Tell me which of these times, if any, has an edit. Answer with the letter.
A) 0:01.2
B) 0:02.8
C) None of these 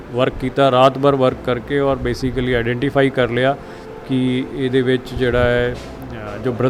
C